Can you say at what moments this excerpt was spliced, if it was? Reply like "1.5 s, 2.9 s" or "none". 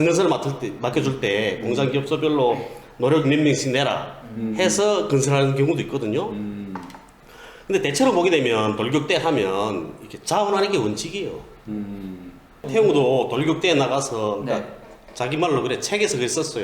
12.6 s